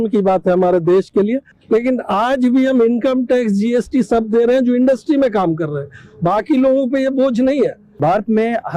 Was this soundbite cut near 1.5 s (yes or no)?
yes